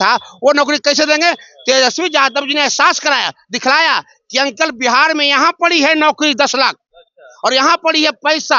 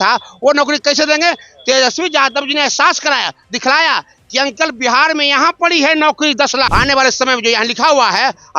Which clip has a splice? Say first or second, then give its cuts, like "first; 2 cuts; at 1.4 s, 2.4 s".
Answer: second; 1 cut; at 6.7 s